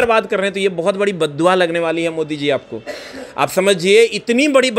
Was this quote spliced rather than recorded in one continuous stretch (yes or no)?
no